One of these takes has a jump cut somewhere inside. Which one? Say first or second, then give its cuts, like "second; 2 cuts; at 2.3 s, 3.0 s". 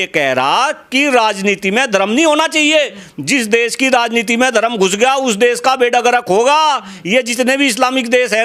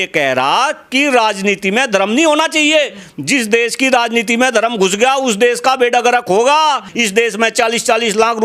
second; 1 cut; at 6.9 s